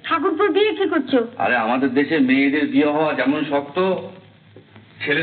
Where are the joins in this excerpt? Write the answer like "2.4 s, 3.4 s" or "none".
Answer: none

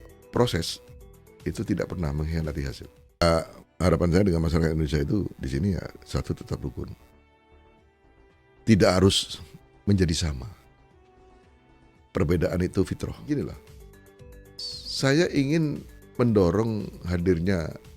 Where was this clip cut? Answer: 3.2 s, 13.1 s

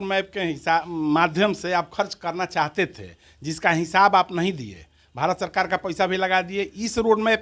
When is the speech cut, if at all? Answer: none

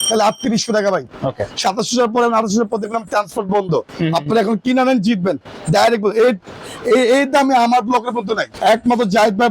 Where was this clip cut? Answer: 1.2 s, 8.4 s

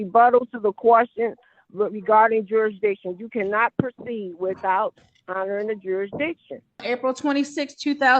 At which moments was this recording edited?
6.8 s

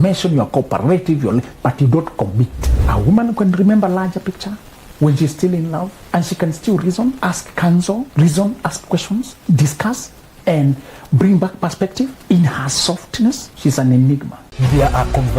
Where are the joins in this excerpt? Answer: 2.6 s, 6.0 s, 7.2 s, 8.1 s, 9.4 s, 12.2 s, 13.5 s, 14.4 s

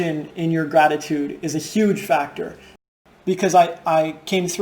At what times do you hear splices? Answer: 2.8 s

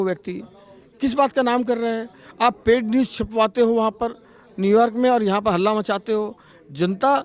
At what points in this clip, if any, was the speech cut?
none

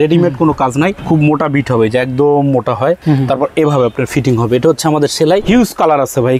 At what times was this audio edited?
1.0 s, 3.0 s, 5.4 s

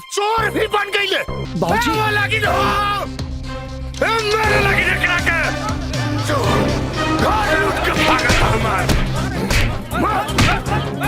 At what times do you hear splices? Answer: 1.4 s

